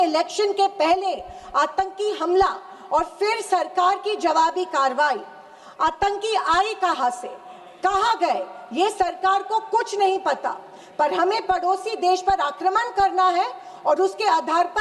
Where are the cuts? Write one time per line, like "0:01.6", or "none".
none